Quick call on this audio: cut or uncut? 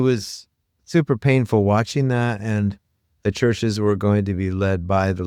uncut